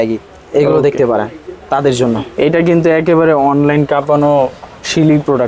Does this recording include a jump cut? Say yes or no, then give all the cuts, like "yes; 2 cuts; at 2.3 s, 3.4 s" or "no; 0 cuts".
no; 0 cuts